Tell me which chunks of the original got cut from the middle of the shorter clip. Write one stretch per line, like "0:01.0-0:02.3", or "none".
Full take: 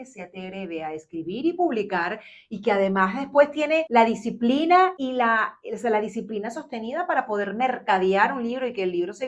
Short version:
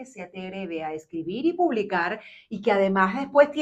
none